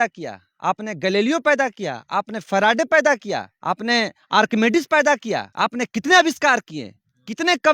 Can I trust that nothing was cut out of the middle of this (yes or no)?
no